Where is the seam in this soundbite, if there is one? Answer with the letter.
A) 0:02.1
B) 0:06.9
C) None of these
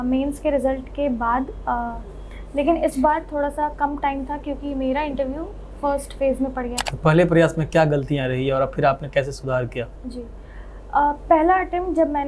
B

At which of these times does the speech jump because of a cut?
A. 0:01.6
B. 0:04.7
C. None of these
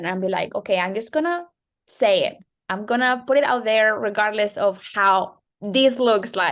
C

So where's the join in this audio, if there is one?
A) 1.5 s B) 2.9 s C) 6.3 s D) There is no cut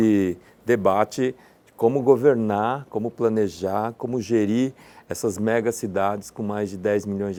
D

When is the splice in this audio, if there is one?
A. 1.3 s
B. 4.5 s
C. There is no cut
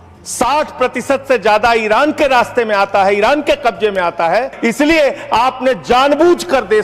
B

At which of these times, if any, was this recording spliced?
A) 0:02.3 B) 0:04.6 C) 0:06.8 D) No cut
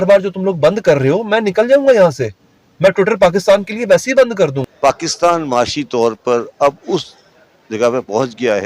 B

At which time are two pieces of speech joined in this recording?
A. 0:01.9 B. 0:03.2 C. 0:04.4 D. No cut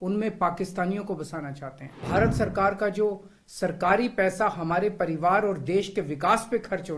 A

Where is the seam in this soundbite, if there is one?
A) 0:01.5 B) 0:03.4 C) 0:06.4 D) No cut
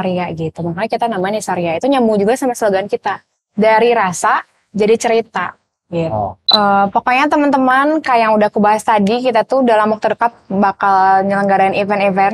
C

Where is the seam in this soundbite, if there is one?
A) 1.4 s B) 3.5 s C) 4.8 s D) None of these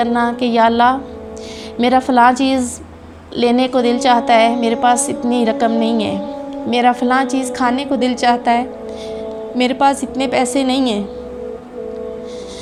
D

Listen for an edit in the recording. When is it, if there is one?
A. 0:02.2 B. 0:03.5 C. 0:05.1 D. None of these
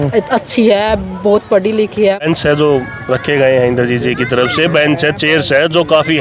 A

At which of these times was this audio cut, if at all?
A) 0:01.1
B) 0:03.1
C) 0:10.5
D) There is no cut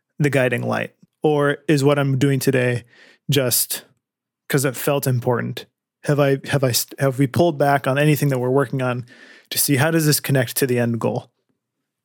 A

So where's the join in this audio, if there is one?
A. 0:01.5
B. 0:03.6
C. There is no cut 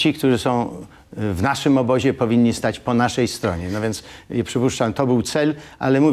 C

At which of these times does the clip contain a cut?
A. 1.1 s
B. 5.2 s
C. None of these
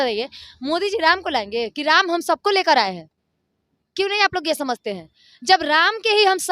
C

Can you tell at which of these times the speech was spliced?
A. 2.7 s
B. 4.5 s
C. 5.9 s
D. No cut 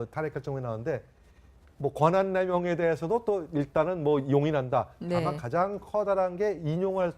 A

